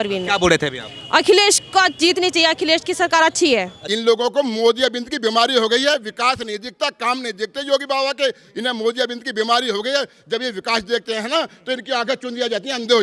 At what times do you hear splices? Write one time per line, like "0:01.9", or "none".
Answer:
0:03.8